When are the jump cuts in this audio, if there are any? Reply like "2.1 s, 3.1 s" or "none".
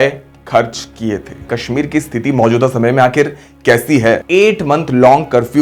1.4 s, 4.2 s